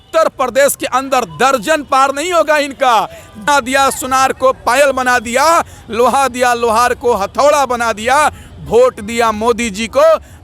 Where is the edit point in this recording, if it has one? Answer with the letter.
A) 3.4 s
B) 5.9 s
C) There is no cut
A